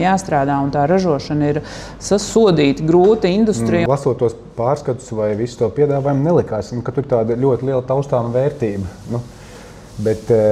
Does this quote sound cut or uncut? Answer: cut